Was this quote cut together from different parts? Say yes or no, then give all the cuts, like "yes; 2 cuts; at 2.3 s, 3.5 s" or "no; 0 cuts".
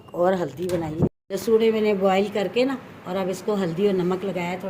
yes; 1 cut; at 1.1 s